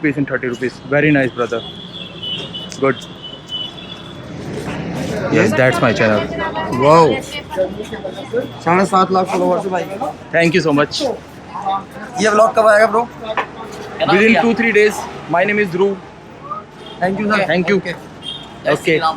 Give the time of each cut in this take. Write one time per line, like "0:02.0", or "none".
0:04.2